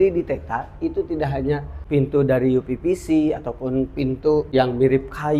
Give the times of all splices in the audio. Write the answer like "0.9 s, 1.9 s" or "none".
1.7 s, 4.5 s